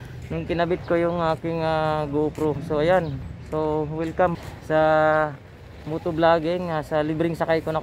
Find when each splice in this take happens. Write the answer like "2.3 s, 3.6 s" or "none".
4.3 s